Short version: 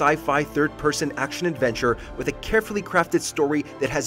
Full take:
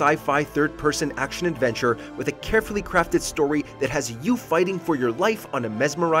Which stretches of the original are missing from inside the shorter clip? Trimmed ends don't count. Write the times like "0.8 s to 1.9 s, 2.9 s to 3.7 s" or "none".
none